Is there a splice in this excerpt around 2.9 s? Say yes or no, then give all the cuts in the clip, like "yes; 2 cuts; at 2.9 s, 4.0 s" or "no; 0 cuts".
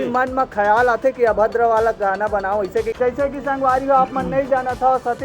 yes; 1 cut; at 2.9 s